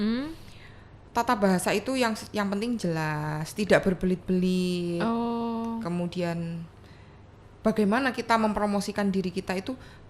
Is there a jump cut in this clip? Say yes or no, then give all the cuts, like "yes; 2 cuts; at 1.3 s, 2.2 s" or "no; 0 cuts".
no; 0 cuts